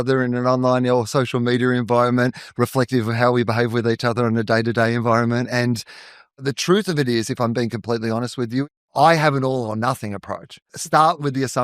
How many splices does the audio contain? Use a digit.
3